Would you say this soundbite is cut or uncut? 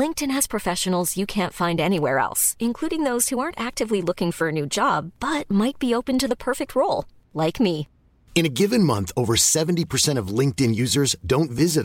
uncut